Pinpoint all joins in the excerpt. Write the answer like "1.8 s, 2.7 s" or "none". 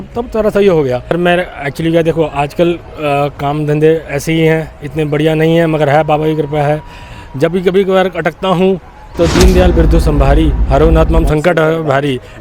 1.1 s

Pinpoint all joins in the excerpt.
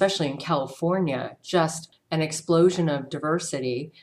1.9 s

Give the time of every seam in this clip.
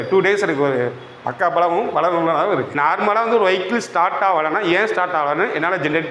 2.7 s

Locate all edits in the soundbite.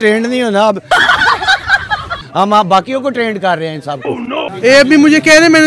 2.2 s, 4.5 s

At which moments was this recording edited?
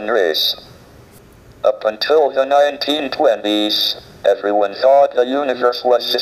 none

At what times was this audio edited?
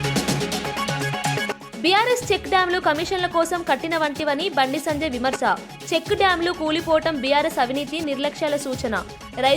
1.6 s

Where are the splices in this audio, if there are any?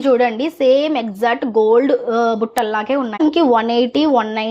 3.2 s

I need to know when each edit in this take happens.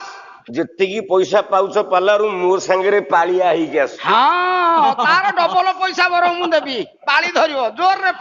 none

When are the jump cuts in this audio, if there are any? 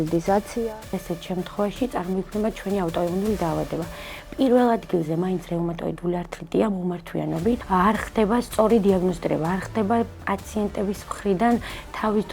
0.9 s, 7.6 s

